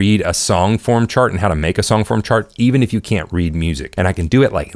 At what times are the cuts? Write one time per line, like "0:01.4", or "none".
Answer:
0:03.8